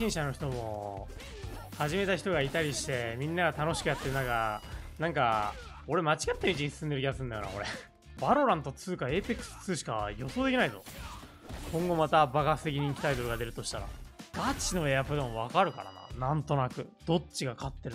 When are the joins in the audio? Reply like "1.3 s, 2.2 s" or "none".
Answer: 8.2 s, 14.2 s